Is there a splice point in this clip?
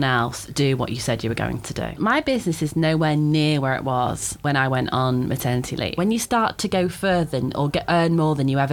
yes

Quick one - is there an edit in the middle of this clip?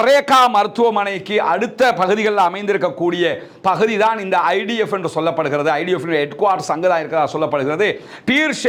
no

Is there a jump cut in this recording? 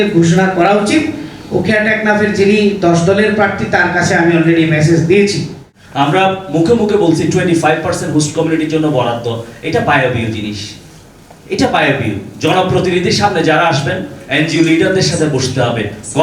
no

